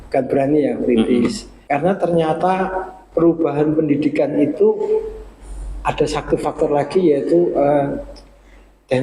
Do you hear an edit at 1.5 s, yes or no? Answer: yes